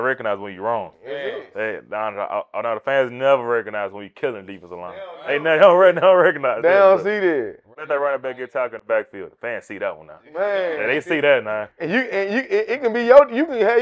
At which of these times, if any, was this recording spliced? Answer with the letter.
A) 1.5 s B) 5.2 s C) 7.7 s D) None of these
C